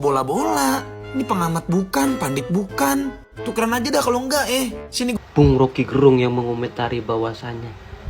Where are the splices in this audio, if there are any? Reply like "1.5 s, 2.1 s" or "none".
5.2 s